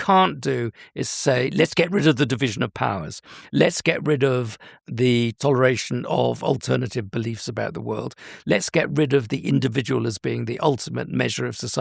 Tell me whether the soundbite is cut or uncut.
cut